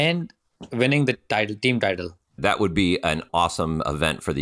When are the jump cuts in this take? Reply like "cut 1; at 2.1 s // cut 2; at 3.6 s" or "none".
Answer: cut 1; at 2.4 s